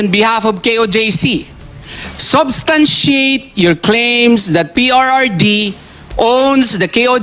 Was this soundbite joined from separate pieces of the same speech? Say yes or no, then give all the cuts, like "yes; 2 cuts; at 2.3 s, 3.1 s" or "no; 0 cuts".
no; 0 cuts